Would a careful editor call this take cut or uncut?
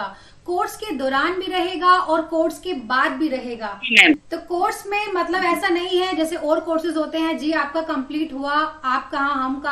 uncut